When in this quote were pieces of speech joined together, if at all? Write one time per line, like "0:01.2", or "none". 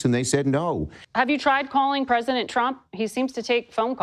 0:01.0